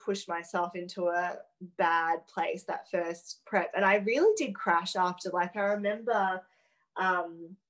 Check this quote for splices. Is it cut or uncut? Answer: uncut